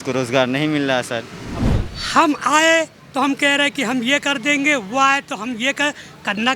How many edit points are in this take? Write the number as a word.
one